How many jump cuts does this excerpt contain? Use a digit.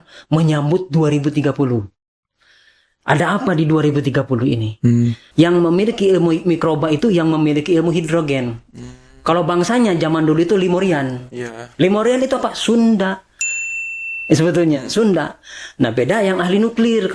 1